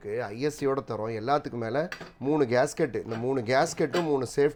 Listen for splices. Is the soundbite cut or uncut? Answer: uncut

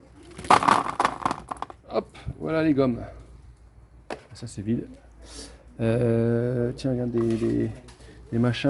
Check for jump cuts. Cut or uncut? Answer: uncut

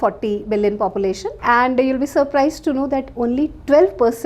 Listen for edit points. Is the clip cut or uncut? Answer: cut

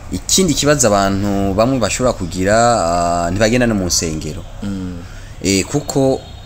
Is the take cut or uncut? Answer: uncut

